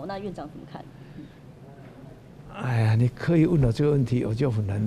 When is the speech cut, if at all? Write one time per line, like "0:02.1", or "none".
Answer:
none

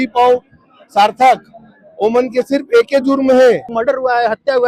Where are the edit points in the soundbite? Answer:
0:03.7

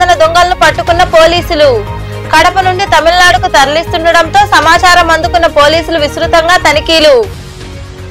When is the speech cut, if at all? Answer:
none

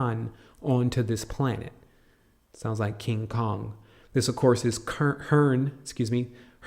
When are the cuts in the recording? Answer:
0:03.8

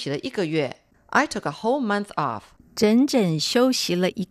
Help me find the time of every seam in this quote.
none

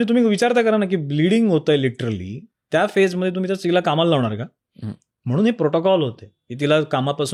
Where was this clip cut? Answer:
none

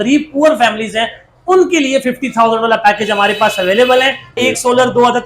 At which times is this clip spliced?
0:04.4

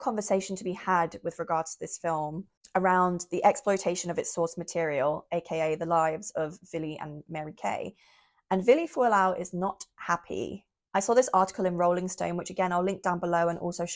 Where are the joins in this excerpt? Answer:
none

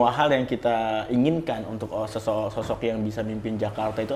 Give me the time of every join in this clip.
none

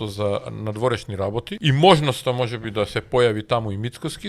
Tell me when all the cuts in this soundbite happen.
0:01.5

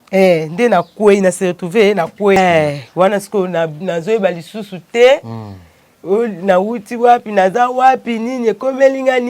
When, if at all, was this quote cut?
0:02.4

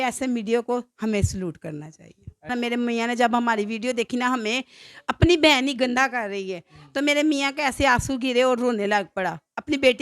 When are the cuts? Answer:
0:02.5

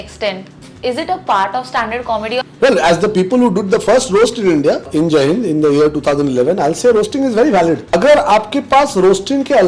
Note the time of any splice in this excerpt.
0:02.5
0:04.9
0:07.9

